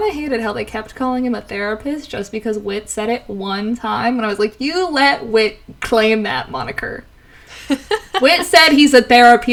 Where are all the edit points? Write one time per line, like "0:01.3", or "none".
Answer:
none